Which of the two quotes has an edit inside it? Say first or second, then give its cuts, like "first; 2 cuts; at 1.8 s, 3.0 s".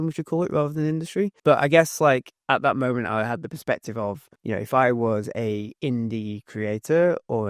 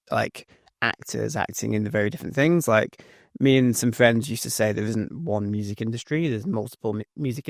first; 2 cuts; at 1.4 s, 4.3 s